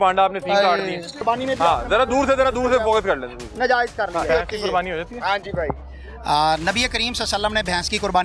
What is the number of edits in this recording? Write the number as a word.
two